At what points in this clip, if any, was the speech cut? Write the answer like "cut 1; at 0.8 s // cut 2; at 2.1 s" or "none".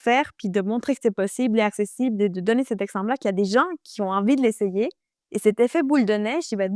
none